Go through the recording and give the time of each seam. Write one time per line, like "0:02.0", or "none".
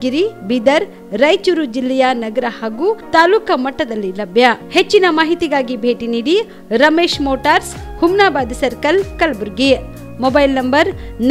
none